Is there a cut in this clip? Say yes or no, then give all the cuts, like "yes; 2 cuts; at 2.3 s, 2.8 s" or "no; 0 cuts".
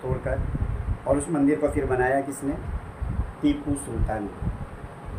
no; 0 cuts